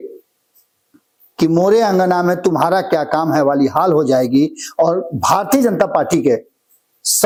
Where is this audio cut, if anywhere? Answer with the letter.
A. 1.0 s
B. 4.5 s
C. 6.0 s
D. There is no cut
D